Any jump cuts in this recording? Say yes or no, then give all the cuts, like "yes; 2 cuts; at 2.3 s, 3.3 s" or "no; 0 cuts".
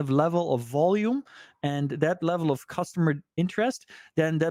no; 0 cuts